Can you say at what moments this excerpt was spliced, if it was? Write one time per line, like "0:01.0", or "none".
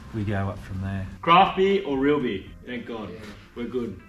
0:01.1
0:02.5